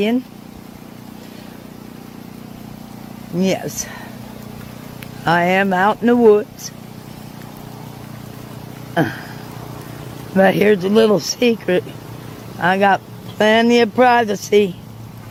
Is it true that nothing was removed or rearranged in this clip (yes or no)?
yes